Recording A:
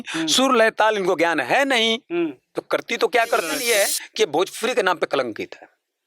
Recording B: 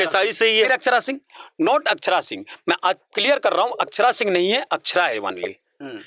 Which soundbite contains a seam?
A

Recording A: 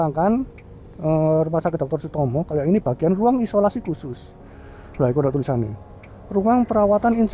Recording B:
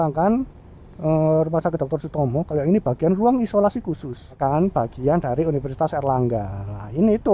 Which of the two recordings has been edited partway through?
B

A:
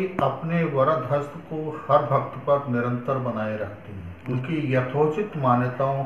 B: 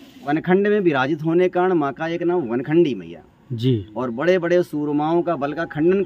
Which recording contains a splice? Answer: A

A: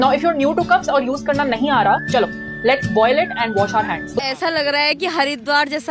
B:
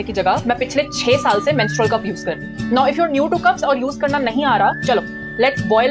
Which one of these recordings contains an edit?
A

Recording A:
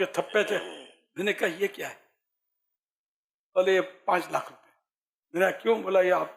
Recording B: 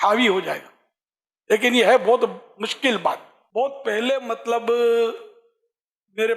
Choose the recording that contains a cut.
B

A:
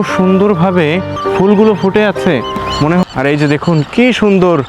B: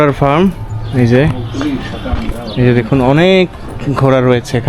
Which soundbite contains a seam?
A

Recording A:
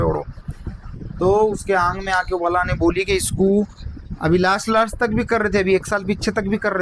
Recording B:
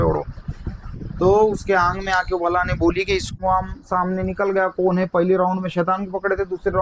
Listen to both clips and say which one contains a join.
B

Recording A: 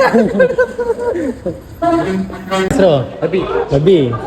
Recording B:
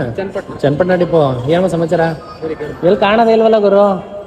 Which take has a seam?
A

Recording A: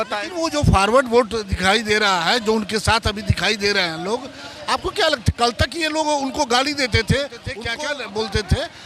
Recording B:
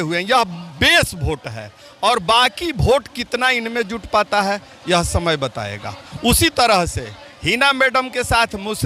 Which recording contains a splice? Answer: A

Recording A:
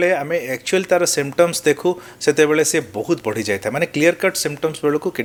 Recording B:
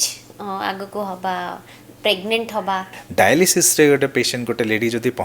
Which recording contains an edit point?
B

